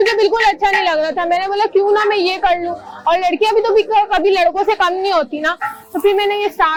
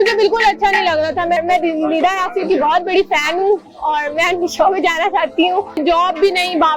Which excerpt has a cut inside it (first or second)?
second